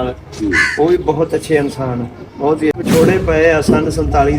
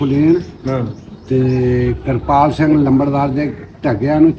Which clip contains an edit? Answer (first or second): first